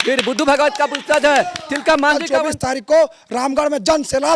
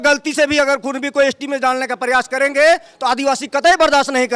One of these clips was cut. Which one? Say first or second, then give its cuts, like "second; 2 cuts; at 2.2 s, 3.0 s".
first; 1 cut; at 2.2 s